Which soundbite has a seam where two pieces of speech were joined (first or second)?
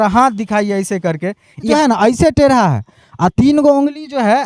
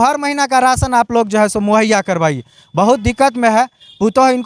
first